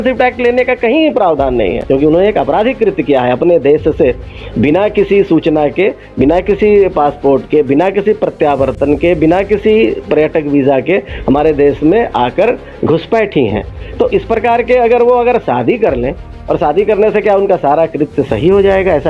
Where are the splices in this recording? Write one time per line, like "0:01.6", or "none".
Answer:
0:01.8